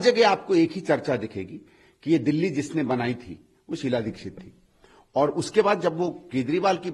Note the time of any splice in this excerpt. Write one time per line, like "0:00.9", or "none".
none